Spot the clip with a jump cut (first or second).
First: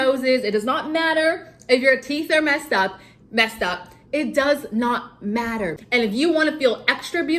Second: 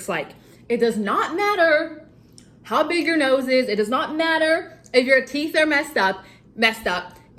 first